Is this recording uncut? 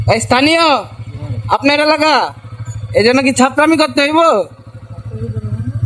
no; 1 cut; at 2.4 s

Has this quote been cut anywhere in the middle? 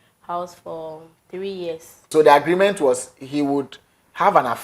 yes; 1 cut; at 2.1 s

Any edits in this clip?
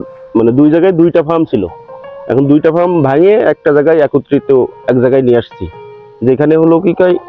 no; 0 cuts

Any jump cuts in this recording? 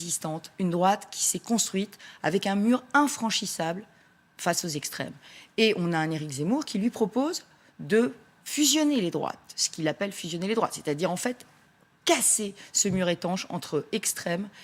no; 0 cuts

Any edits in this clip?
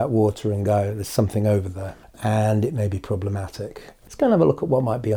yes; 1 cut; at 3.9 s

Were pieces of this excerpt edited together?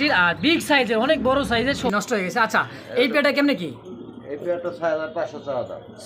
yes; 1 cut; at 1.9 s

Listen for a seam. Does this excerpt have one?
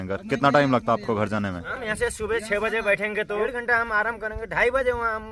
yes; 2 cuts; at 1.7 s, 3.4 s

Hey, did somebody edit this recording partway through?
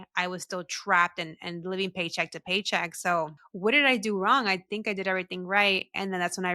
yes; 1 cut; at 3.4 s

